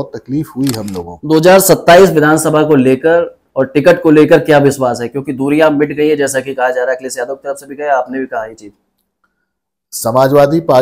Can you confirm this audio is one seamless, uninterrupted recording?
no; 1 cut; at 1.1 s

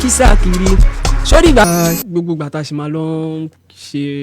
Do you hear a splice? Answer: yes; 1 cut; at 1.6 s

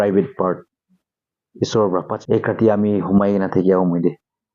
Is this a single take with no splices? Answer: no; 1 cut; at 2.2 s

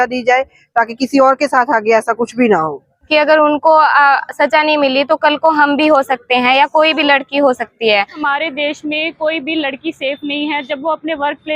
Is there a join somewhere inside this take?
yes; 2 cuts; at 3.1 s, 8.2 s

